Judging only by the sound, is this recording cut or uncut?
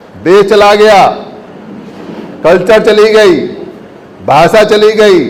uncut